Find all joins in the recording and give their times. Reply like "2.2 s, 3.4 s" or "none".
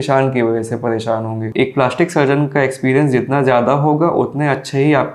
1.4 s

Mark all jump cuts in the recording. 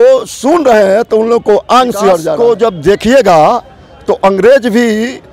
2.3 s

